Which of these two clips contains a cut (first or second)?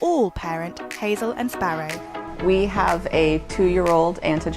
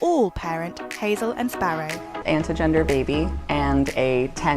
second